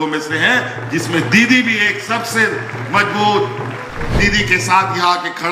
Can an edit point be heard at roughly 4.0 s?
yes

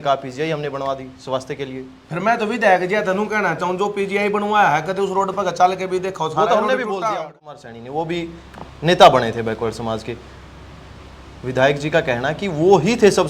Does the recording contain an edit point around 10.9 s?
no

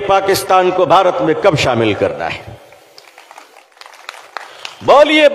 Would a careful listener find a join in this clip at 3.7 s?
yes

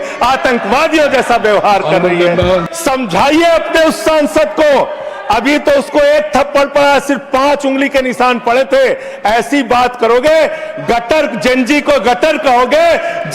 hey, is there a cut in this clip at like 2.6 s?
yes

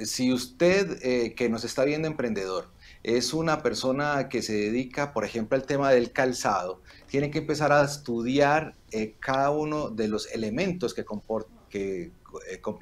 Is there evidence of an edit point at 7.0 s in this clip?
no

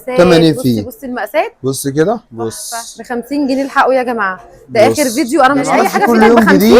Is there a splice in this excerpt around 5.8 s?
yes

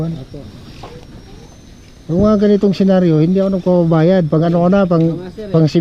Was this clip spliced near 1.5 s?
yes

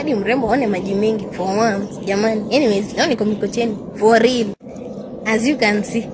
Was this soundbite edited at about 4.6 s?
no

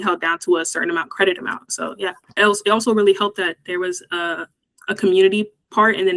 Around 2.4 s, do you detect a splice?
yes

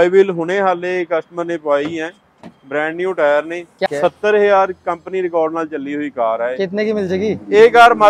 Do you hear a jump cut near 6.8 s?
no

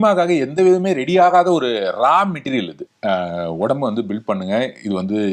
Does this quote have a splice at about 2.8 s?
yes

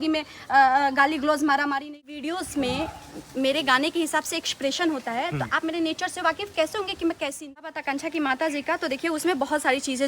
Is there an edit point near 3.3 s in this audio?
no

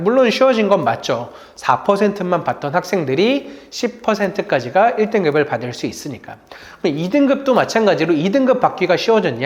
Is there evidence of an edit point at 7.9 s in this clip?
no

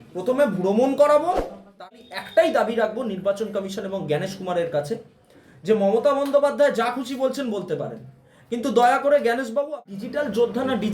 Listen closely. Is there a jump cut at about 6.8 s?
no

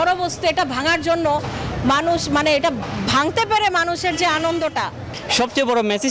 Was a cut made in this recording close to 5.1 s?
yes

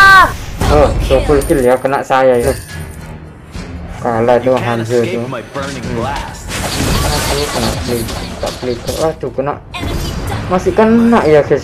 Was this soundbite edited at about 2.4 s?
yes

